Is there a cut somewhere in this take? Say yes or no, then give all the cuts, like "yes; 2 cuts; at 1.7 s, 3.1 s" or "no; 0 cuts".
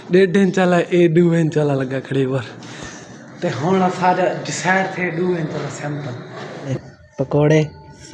yes; 1 cut; at 6.7 s